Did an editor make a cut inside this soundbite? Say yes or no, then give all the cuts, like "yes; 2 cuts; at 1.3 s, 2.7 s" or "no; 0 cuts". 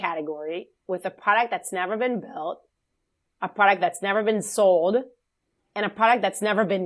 no; 0 cuts